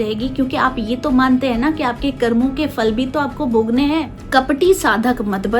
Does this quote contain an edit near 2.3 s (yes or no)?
no